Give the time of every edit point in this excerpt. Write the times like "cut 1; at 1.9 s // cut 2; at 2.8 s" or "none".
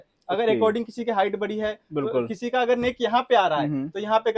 none